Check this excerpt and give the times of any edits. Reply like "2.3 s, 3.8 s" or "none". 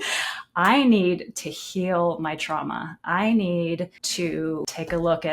4.4 s